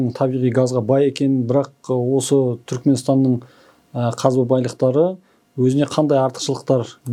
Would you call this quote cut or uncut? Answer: uncut